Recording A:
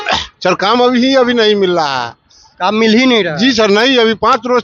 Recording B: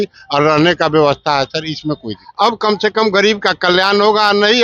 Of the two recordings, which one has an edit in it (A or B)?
B